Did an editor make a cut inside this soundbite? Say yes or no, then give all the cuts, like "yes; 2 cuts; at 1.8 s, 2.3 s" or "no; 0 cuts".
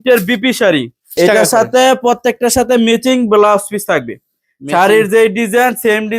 yes; 1 cut; at 1.1 s